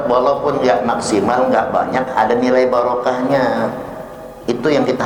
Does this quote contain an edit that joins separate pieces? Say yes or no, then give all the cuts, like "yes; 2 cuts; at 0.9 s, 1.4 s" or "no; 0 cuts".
no; 0 cuts